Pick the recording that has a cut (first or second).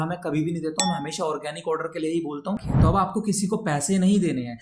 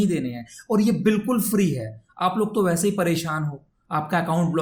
first